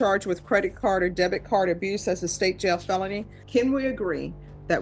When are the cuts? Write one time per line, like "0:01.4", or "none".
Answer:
0:03.4

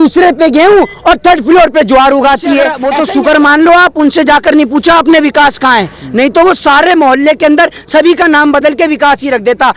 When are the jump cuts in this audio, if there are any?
0:02.8

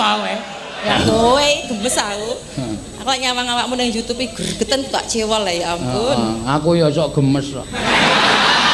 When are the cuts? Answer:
0:00.9

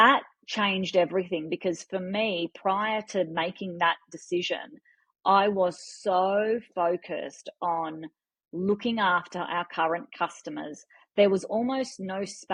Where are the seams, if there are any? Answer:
none

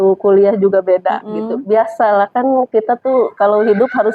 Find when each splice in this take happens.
none

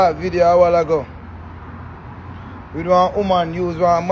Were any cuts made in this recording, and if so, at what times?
none

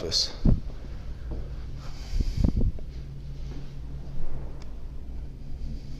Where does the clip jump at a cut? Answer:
none

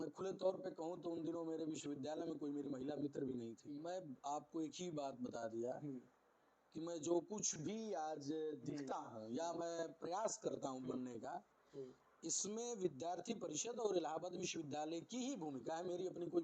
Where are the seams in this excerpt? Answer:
0:03.6

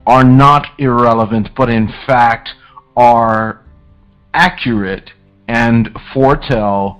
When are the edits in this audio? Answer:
none

